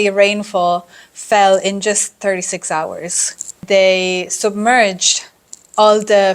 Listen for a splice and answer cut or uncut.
cut